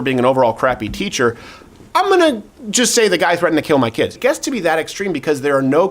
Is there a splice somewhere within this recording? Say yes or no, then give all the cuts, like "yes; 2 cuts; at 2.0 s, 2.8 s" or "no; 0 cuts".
yes; 1 cut; at 4.1 s